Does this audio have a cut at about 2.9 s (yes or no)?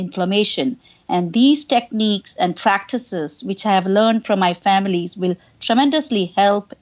no